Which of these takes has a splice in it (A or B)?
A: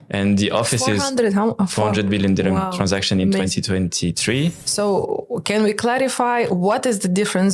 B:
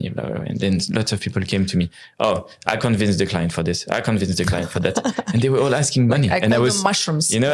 A